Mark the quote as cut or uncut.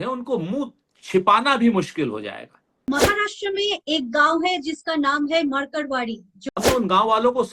cut